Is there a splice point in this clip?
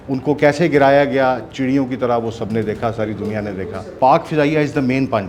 yes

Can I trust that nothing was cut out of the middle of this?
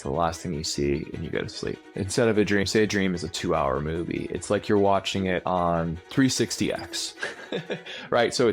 no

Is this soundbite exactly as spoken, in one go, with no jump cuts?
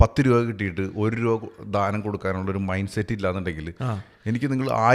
yes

